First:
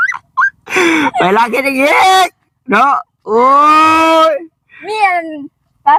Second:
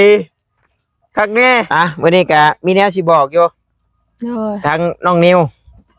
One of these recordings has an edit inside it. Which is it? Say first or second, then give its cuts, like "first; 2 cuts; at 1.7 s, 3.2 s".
second; 1 cut; at 1.7 s